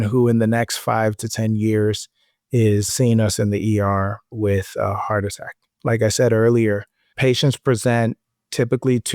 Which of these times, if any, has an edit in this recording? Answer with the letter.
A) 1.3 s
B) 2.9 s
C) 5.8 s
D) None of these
B